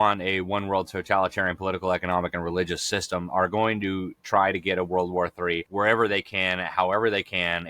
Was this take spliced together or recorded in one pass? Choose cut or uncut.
cut